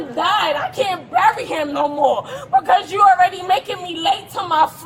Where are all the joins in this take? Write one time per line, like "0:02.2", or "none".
none